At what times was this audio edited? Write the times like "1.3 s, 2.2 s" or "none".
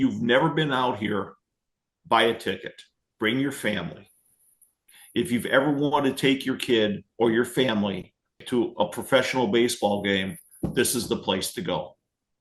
4.9 s, 8.4 s